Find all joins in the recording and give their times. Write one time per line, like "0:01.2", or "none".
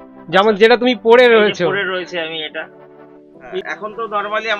0:03.3